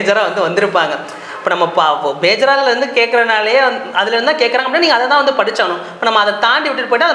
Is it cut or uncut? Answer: uncut